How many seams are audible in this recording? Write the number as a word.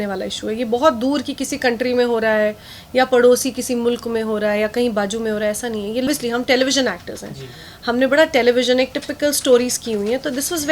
one